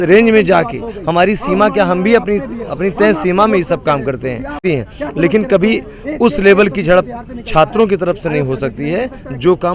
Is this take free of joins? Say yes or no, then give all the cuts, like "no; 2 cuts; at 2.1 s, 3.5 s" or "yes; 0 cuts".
no; 1 cut; at 4.6 s